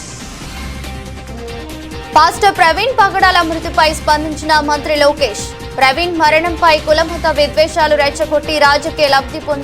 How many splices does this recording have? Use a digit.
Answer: 0